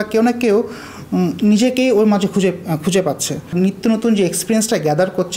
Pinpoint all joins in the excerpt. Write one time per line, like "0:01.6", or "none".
0:03.5